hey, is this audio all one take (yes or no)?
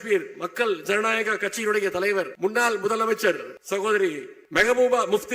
no